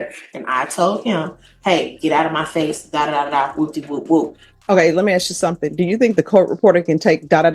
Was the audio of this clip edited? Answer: no; 0 cuts

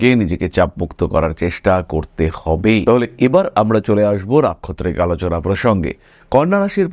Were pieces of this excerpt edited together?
no; 0 cuts

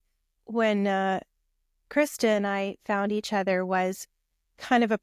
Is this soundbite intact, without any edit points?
yes; 0 cuts

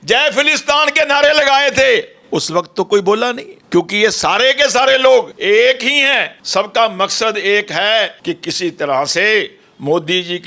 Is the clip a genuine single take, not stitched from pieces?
no; 4 cuts; at 3.5 s, 5.3 s, 6.3 s, 8.2 s

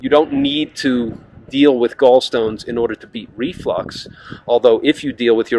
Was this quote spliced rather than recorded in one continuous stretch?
no; 0 cuts

